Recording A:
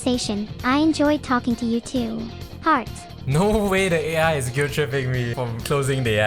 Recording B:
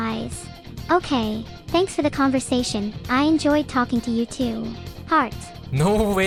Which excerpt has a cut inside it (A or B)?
A